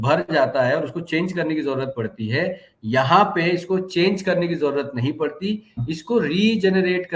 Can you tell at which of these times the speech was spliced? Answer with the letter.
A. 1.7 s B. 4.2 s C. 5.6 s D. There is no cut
D